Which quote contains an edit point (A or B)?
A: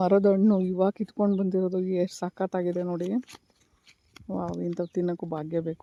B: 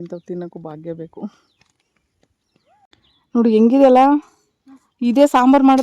B